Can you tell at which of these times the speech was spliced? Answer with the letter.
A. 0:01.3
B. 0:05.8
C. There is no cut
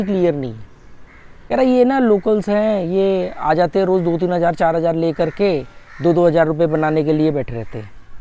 A